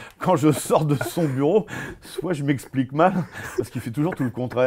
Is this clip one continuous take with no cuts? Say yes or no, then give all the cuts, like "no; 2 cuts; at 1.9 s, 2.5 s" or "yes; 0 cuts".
yes; 0 cuts